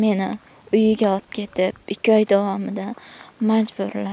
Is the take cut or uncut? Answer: uncut